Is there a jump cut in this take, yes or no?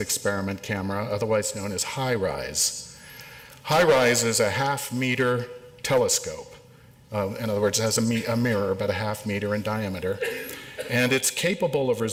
no